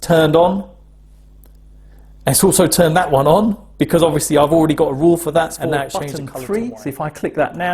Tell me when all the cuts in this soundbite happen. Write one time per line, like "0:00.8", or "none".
0:06.0